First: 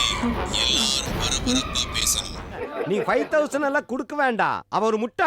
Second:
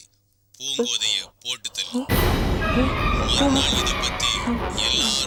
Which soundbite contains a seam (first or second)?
first